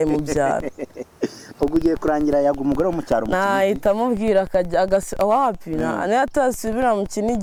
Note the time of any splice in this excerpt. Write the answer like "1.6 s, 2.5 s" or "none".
none